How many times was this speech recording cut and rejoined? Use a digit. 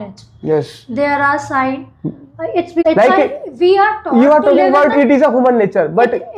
1